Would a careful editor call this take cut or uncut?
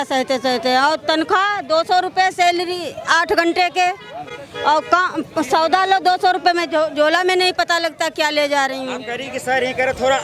uncut